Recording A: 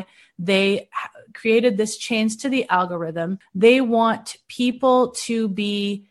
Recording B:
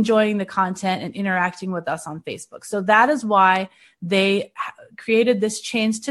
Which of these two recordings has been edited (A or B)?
A